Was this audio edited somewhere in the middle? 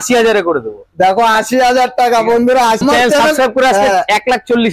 yes; 1 cut; at 2.8 s

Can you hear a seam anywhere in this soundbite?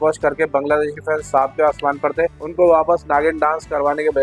no; 0 cuts

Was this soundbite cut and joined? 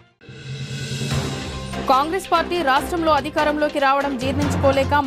no; 0 cuts

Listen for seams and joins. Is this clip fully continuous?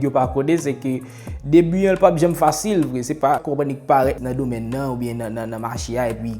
no; 2 cuts; at 3.4 s, 4.2 s

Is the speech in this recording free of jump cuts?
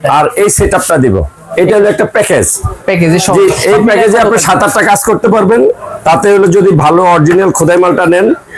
yes; 0 cuts

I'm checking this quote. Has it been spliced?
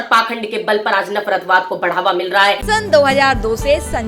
yes; 1 cut; at 2.6 s

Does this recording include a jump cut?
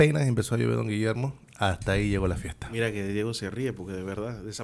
no; 0 cuts

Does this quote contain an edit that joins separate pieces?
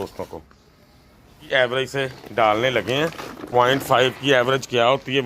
yes; 1 cut; at 1.4 s

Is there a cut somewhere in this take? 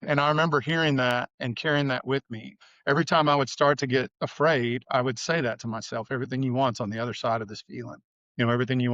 yes; 3 cuts; at 1.4 s, 2.6 s, 4.2 s

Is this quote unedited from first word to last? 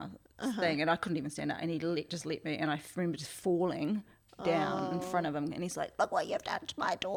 yes; 0 cuts

